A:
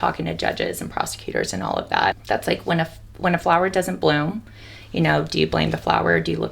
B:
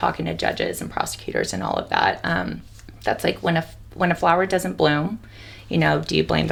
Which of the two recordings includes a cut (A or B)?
A